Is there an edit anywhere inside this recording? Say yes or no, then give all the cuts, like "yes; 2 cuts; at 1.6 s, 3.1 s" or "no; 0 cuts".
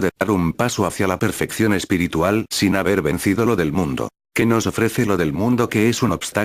no; 0 cuts